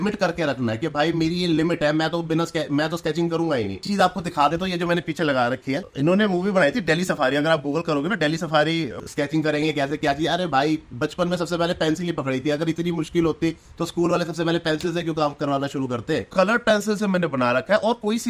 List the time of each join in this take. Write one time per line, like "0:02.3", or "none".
0:03.8
0:05.9
0:08.9
0:16.3